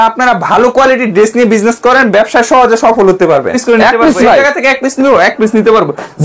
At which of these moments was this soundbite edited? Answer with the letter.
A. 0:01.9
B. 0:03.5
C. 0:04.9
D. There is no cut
B